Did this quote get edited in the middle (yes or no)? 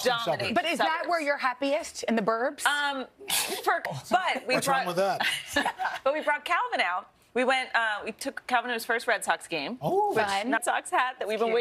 yes